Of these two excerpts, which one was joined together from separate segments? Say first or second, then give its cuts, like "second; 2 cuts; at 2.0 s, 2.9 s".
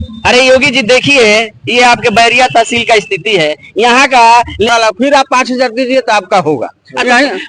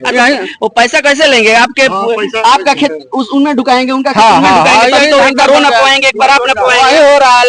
first; 1 cut; at 4.7 s